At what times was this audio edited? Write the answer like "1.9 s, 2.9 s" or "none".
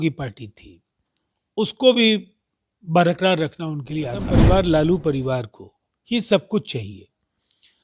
4.3 s